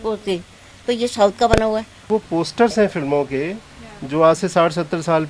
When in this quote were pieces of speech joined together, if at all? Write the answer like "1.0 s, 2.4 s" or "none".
2.1 s